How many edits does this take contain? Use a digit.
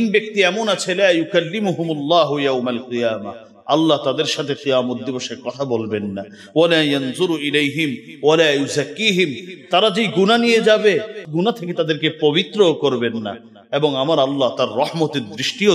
1